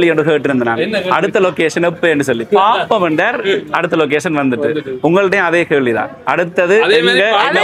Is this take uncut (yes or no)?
yes